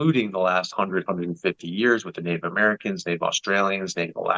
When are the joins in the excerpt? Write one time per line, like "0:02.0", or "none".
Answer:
none